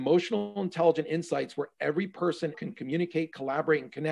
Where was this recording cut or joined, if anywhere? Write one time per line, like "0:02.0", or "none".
0:02.6